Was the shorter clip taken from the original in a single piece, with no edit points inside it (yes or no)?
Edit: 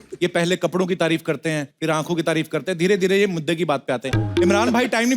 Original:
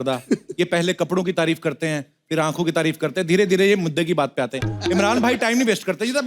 no